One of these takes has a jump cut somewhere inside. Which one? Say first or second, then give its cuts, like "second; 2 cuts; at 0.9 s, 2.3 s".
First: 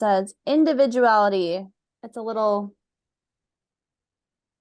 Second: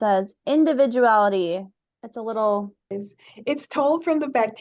second; 1 cut; at 2.8 s